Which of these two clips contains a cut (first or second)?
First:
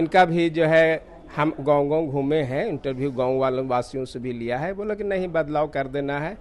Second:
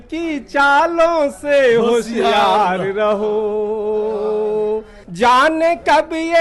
second